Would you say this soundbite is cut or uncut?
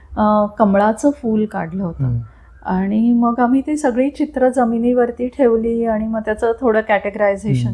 uncut